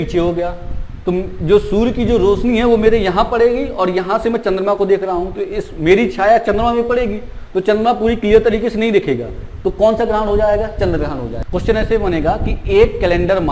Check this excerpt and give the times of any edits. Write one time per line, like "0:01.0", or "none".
0:11.3